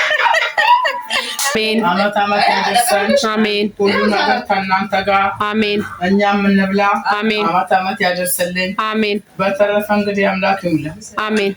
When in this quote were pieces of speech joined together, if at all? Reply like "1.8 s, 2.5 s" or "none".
1.5 s